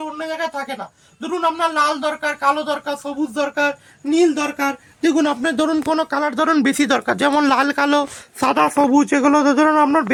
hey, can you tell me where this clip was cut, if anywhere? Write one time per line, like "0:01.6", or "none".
none